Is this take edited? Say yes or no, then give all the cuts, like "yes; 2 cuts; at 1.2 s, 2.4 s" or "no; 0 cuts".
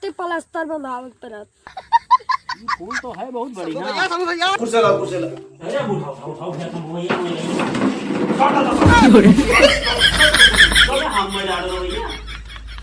yes; 1 cut; at 4.5 s